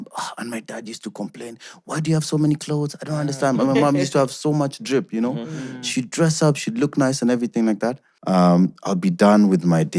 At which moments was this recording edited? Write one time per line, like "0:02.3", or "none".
0:08.1